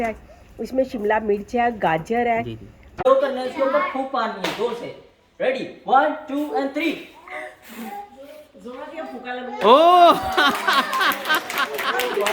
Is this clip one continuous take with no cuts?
no; 1 cut; at 3.0 s

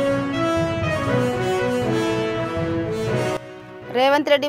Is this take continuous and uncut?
yes; 0 cuts

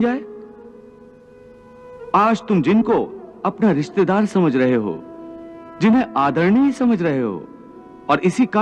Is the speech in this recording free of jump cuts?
yes; 0 cuts

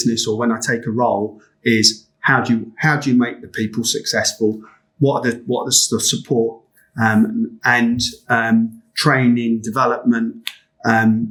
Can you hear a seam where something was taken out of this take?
no; 0 cuts

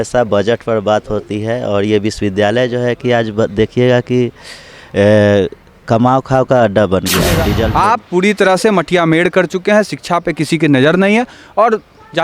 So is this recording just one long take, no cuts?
no; 1 cut; at 7.6 s

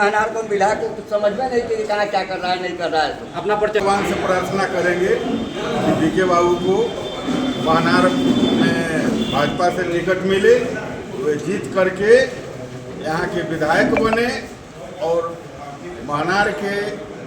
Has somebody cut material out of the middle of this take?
yes; 1 cut; at 3.8 s

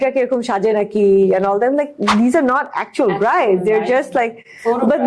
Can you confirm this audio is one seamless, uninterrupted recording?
yes; 0 cuts

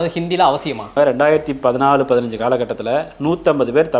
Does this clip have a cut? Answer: yes; 1 cut; at 0.9 s

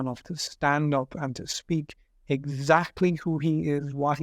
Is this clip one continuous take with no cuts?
yes; 0 cuts

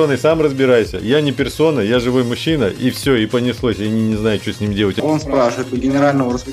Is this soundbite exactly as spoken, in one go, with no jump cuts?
no; 1 cut; at 5.0 s

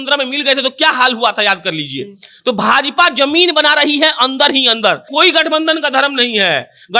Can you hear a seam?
yes; 1 cut; at 5.1 s

